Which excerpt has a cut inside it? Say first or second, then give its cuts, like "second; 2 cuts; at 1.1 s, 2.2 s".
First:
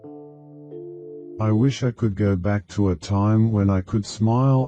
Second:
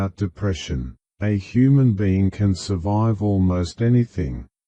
first; 1 cut; at 0.9 s